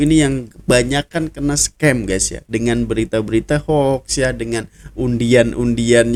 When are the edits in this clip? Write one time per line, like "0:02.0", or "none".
none